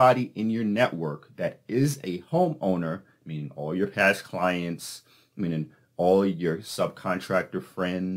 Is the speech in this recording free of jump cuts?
yes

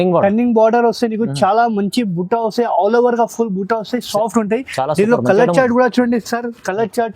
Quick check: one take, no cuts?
yes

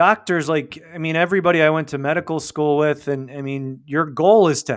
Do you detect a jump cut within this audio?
no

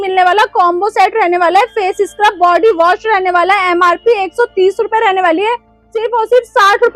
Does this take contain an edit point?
no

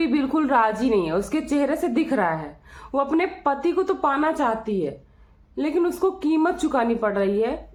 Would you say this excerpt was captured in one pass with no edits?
yes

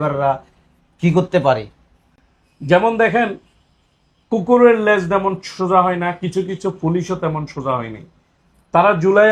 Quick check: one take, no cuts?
yes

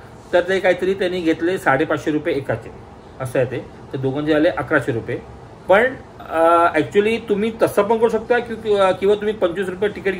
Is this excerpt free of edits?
yes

